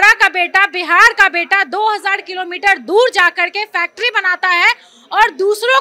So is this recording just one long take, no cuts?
yes; 0 cuts

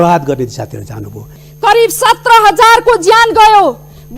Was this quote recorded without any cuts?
no; 1 cut; at 1.3 s

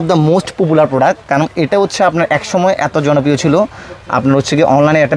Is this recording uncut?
yes; 0 cuts

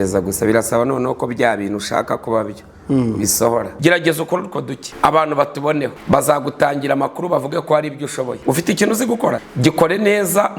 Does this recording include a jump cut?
yes; 5 cuts; at 3.7 s, 4.8 s, 6.0 s, 8.4 s, 9.5 s

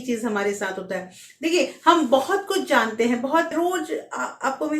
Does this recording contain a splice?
yes; 1 cut; at 3.5 s

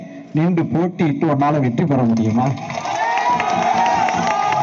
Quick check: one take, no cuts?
yes; 0 cuts

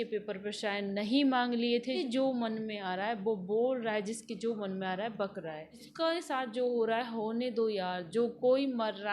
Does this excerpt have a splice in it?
yes; 2 cuts; at 2.0 s, 5.9 s

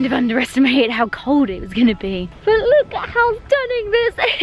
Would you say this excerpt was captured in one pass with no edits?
yes; 0 cuts

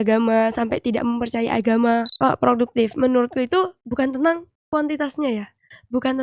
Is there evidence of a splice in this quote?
yes; 1 cut; at 2.1 s

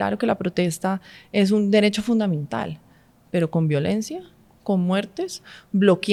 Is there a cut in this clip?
no; 0 cuts

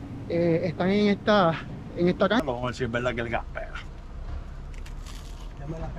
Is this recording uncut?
no; 1 cut; at 2.4 s

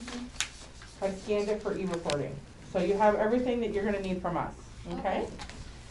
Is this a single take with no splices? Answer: yes; 0 cuts

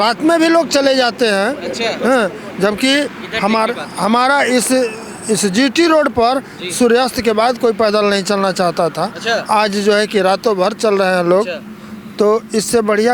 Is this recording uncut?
yes; 0 cuts

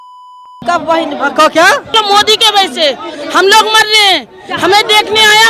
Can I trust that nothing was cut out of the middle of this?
no; 1 cut; at 1.9 s

